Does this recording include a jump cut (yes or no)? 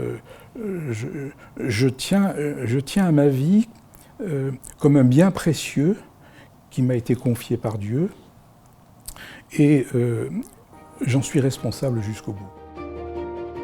yes